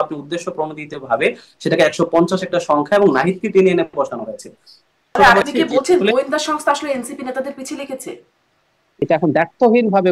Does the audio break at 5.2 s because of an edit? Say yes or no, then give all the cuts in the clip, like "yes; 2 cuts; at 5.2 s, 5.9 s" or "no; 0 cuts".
yes; 2 cuts; at 5.2 s, 9.0 s